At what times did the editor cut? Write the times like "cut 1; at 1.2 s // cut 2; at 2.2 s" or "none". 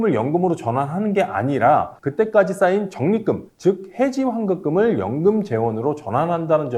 none